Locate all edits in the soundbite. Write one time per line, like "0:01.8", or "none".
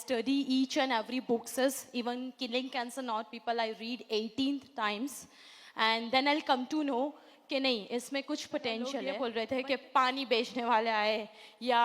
0:09.1

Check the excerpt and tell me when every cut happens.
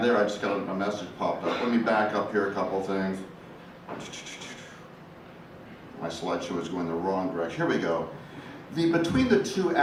none

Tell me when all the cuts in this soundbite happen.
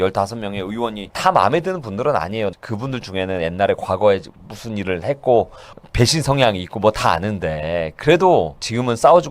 0:01.0
0:02.5
0:05.8

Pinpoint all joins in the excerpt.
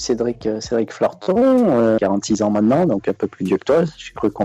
0:02.0

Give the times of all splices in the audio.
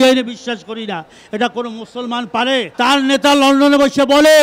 0:02.7

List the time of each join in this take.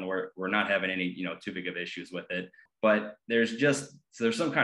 0:02.6

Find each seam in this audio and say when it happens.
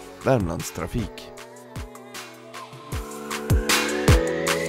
0:01.1

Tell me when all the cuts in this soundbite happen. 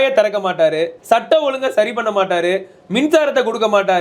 0:01.0

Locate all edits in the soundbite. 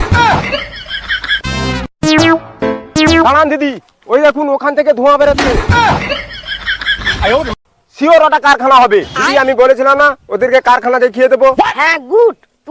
0:01.2

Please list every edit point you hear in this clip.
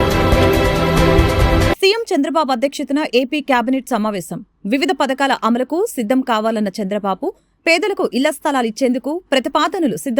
0:01.5

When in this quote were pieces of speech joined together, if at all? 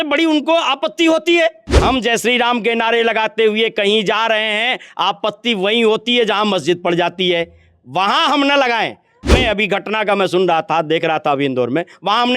0:01.7
0:09.3

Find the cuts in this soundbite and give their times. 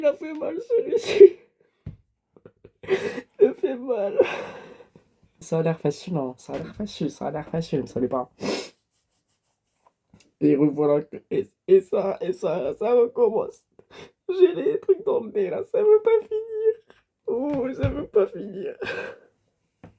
0:05.4

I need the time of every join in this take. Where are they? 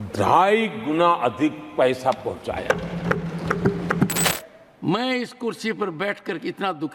0:04.3

